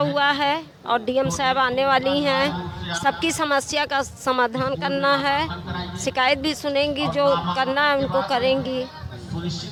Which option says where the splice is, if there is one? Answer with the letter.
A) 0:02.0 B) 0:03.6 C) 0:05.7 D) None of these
D